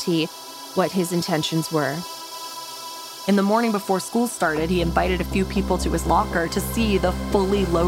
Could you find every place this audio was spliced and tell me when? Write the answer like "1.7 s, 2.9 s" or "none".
2.7 s